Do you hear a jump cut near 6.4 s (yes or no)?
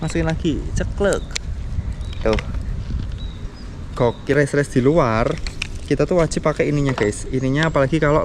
no